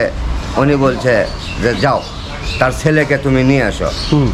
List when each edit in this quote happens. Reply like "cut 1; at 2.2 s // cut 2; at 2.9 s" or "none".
none